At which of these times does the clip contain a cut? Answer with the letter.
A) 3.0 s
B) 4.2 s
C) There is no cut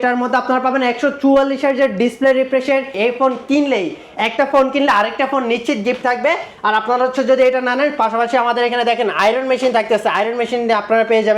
A